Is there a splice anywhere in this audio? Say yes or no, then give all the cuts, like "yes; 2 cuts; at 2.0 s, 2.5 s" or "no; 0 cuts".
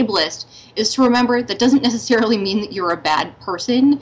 no; 0 cuts